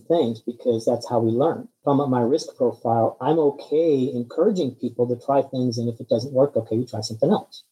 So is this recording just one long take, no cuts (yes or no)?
yes